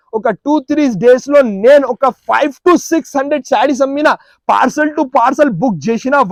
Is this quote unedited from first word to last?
yes; 0 cuts

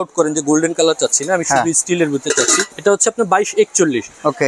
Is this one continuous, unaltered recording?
yes; 0 cuts

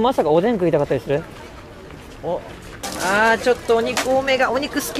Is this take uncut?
no; 1 cut; at 2.8 s

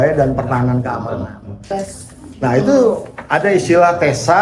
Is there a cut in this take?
yes; 1 cut; at 1.7 s

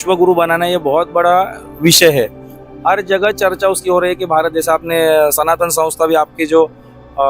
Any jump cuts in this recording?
no; 0 cuts

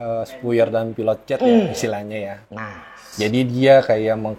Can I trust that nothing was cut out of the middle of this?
yes; 0 cuts

